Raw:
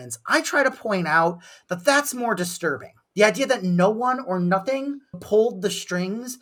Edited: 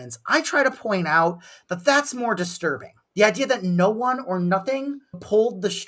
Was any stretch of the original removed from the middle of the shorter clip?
no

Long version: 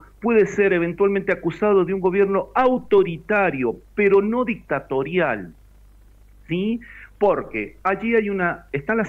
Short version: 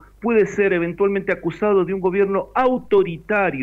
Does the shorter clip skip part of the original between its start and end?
no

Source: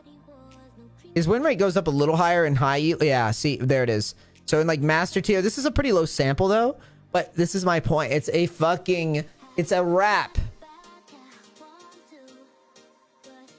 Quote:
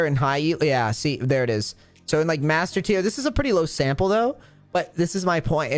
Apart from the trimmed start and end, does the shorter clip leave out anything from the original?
no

